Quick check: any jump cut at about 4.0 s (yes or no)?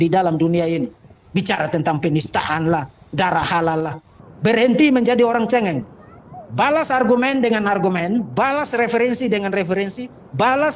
yes